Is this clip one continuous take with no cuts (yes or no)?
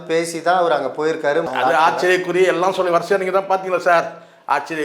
no